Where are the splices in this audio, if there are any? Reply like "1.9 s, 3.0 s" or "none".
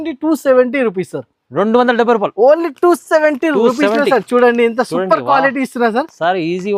none